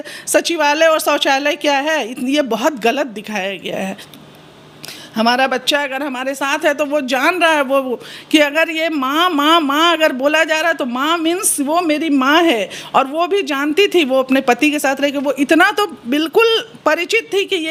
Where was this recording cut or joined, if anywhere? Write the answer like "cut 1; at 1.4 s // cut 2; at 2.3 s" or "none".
none